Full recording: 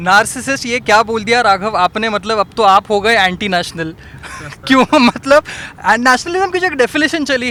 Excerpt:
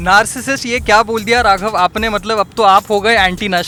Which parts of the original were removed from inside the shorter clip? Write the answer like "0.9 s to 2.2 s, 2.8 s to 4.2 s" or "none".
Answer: none